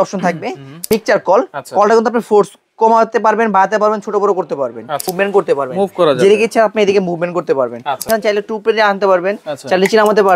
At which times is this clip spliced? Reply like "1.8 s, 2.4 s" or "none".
0.8 s, 5.1 s, 8.0 s